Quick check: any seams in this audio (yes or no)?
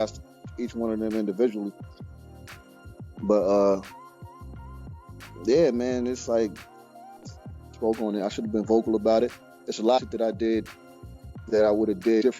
yes